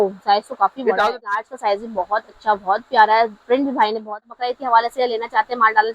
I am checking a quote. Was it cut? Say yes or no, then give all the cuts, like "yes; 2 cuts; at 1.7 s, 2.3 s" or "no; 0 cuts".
yes; 2 cuts; at 1.4 s, 4.2 s